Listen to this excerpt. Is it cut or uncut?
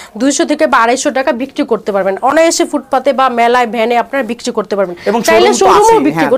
uncut